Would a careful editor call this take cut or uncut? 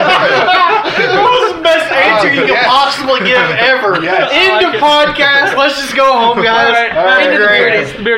uncut